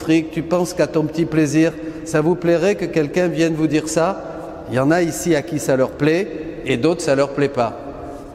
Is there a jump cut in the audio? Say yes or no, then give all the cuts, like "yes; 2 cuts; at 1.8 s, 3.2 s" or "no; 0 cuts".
no; 0 cuts